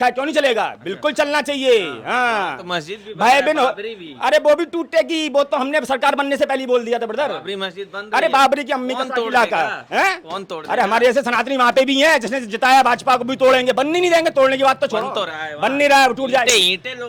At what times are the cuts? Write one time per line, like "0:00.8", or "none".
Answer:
none